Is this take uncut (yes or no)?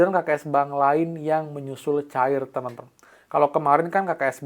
yes